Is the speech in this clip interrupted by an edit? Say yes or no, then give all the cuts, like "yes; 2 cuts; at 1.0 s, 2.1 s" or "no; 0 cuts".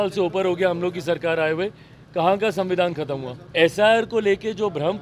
yes; 1 cut; at 3.4 s